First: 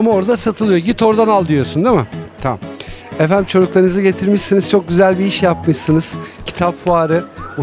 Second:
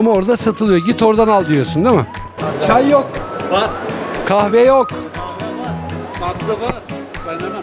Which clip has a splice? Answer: second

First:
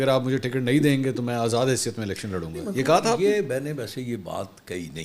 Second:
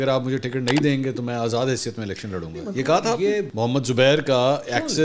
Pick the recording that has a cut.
second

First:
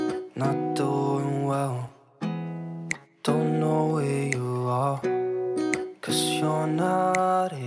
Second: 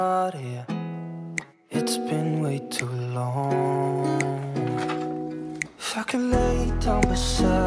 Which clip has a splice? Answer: second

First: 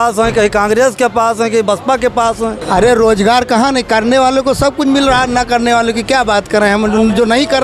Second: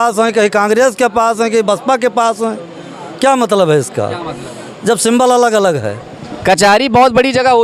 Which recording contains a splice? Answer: first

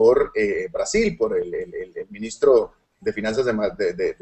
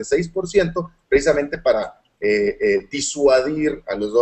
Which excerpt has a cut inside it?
first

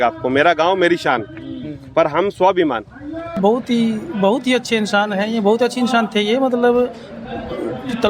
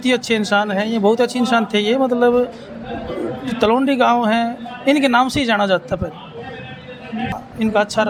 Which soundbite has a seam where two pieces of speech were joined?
first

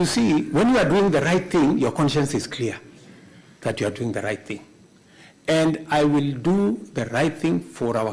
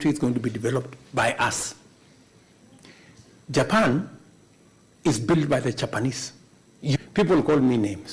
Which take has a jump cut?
second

